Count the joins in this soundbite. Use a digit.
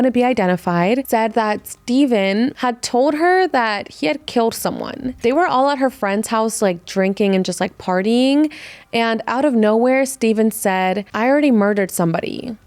2